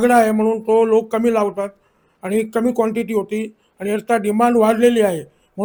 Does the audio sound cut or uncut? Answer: uncut